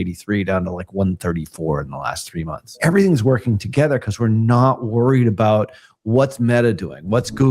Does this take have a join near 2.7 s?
yes; 1 cut; at 2.7 s

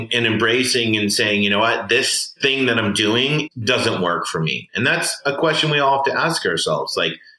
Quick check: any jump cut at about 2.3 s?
yes; 2 cuts; at 2.3 s, 3.5 s

